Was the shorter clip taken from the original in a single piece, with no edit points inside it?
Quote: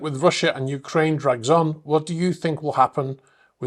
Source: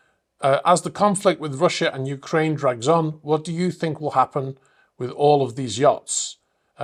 yes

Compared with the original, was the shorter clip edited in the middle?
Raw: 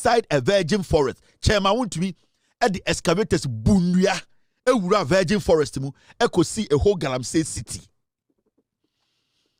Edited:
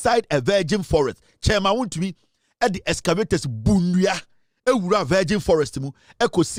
no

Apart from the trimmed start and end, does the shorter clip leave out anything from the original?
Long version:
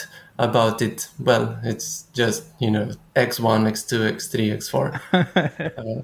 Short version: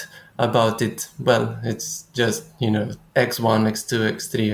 no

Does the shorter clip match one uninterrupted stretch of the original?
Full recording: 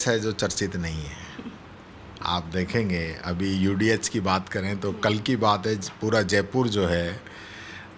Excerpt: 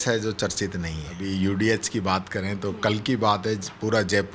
no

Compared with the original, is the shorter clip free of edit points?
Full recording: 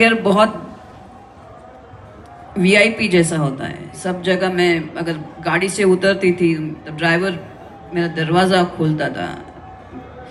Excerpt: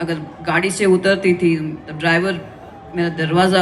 yes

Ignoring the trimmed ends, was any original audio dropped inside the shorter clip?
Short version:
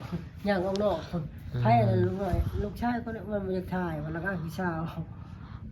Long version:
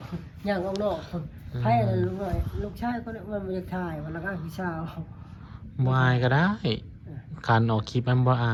no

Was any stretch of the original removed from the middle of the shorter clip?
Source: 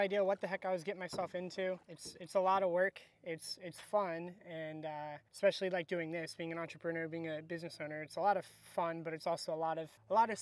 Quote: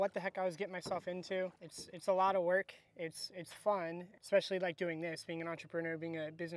yes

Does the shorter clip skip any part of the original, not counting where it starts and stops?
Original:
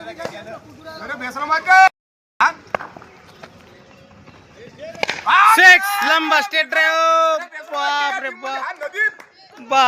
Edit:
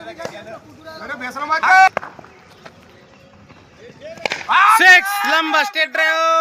yes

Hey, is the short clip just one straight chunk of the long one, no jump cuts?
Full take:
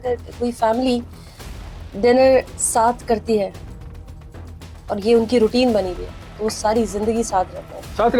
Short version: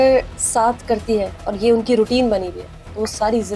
no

